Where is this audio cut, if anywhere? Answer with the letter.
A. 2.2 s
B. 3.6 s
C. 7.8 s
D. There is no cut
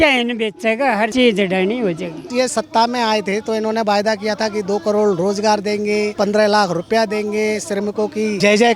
A